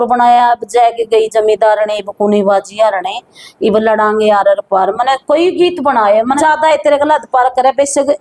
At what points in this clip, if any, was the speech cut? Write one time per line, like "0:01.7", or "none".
0:06.4